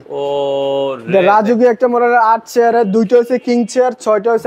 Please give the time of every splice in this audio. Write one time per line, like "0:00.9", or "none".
none

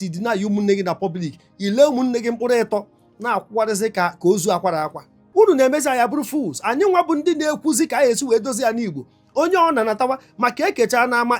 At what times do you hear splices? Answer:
0:05.2

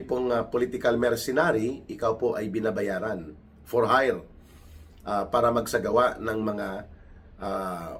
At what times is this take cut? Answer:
none

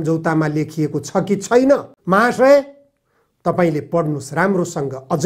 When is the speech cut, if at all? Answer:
0:01.9

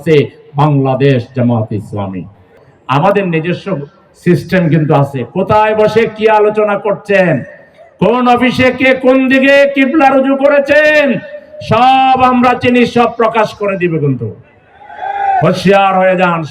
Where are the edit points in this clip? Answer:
0:02.6

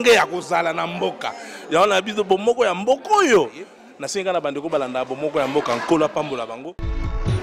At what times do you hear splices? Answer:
none

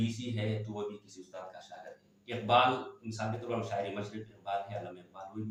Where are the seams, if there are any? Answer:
none

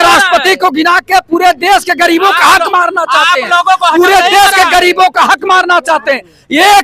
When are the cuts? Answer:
none

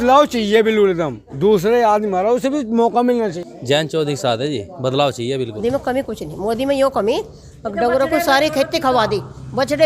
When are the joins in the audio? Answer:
0:03.4
0:05.9

